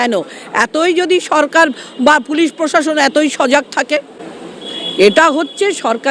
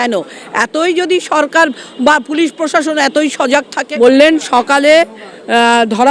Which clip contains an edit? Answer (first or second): second